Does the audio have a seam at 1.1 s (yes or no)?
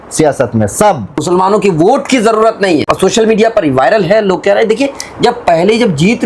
yes